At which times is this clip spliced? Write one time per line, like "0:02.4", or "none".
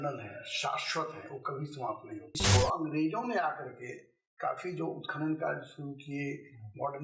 0:02.3